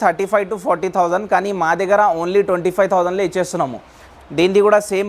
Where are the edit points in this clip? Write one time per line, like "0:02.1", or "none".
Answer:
0:04.0